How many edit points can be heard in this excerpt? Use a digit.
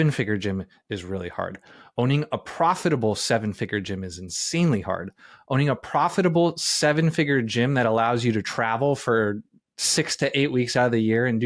0